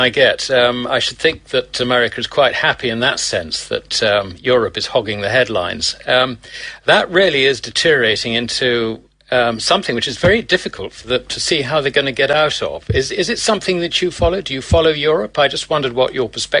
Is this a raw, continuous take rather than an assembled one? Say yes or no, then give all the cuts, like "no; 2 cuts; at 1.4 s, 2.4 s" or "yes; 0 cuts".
no; 1 cut; at 2.1 s